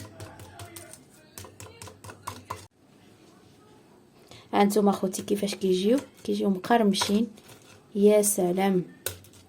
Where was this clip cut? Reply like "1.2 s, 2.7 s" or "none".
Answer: 2.7 s